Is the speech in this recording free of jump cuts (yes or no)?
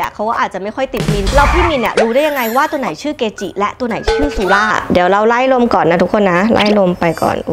no